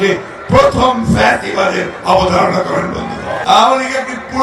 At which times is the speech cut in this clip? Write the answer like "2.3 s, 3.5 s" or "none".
3.3 s